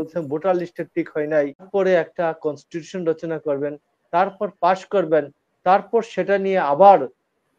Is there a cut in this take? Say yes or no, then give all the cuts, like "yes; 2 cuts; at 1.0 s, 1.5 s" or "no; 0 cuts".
yes; 1 cut; at 1.7 s